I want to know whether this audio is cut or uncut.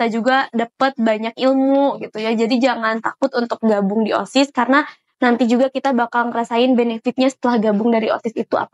uncut